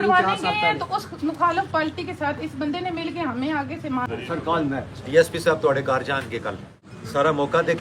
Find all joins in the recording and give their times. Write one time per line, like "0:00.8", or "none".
0:04.0
0:06.7